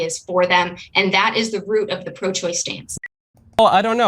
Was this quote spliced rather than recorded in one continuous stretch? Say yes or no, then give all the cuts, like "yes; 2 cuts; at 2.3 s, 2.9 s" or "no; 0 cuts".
yes; 1 cut; at 2.8 s